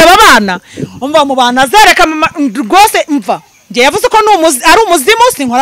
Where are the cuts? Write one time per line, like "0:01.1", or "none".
none